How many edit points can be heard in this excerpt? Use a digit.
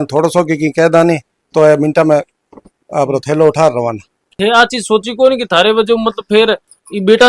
2